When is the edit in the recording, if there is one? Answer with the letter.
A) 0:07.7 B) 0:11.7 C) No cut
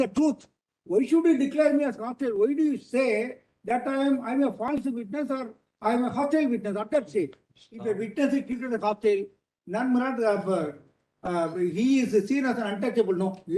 A